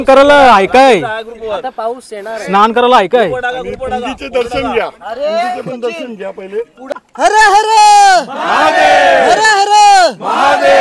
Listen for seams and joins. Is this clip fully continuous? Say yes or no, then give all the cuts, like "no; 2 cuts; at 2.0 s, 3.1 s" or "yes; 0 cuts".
no; 1 cut; at 6.9 s